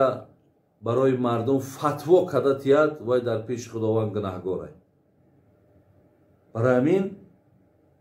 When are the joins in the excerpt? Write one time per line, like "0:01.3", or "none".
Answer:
0:05.1